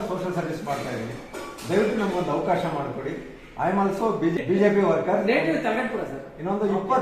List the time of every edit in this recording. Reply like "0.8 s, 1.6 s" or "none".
4.4 s